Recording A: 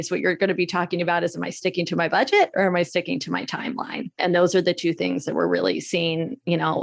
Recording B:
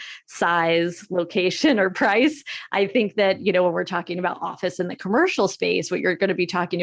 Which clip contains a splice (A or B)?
A